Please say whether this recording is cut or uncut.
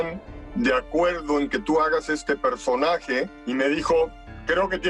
cut